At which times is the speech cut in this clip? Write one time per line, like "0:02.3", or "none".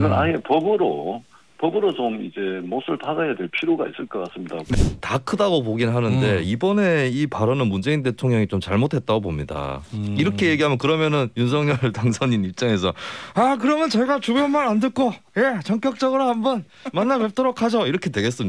0:04.7